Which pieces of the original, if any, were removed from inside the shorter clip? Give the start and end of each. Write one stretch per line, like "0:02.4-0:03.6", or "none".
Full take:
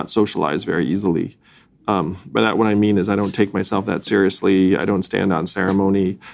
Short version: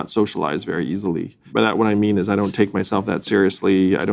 0:01.4-0:02.2